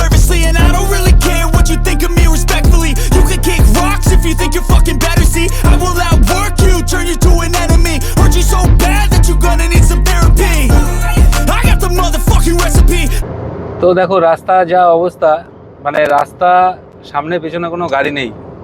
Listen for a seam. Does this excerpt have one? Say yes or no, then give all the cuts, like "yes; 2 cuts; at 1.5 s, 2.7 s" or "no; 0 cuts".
yes; 1 cut; at 13.1 s